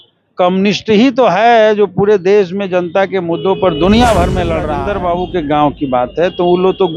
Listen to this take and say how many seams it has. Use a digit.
1